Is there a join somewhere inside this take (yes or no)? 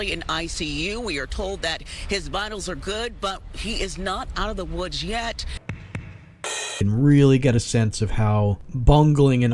yes